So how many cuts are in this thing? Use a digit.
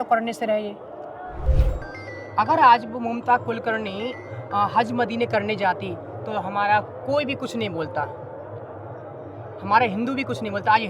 1